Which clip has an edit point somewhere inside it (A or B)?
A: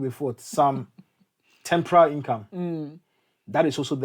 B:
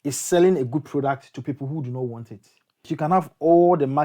B